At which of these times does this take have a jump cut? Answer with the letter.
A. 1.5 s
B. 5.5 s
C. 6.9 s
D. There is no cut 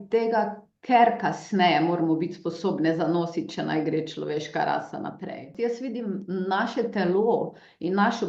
B